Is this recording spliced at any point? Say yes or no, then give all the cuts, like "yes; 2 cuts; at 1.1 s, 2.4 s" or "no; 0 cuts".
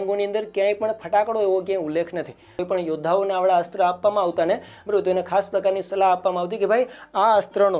yes; 1 cut; at 2.6 s